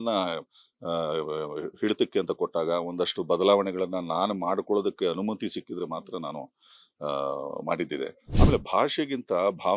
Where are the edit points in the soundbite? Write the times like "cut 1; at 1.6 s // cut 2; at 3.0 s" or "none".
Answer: cut 1; at 8.2 s